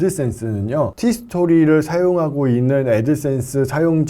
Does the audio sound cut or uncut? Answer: cut